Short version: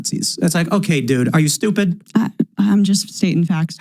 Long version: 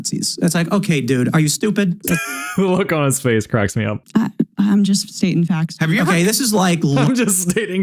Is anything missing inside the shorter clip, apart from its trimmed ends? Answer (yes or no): yes